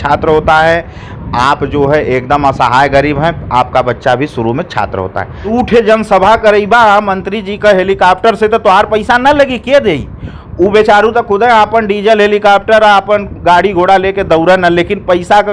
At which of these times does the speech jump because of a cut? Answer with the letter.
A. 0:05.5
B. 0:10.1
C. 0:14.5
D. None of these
A